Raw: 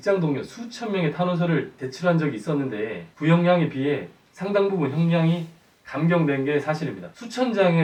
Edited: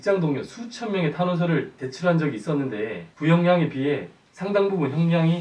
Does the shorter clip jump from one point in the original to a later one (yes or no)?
no